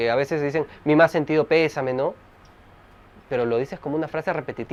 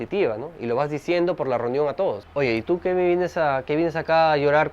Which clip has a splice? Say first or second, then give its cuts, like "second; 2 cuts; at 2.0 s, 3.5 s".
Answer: second; 1 cut; at 2.2 s